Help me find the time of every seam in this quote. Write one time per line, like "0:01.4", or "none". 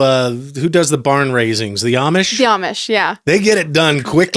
0:03.2